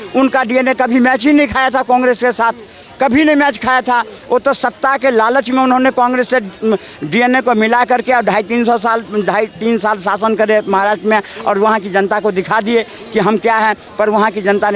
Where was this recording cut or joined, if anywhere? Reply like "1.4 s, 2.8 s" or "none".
none